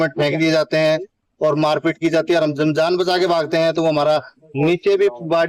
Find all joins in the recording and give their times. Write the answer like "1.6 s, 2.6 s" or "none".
none